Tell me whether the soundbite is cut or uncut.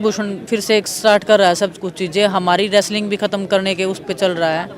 uncut